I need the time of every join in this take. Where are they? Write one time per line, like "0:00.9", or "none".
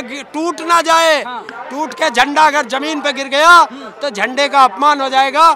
none